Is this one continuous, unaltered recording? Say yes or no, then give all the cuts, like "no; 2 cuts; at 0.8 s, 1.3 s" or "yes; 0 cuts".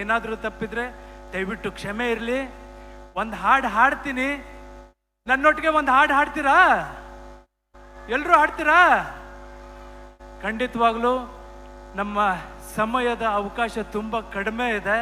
yes; 0 cuts